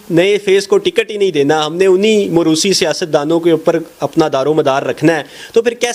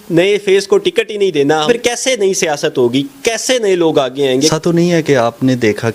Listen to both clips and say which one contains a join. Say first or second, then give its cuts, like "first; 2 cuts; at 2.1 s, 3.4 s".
second; 2 cuts; at 1.7 s, 4.3 s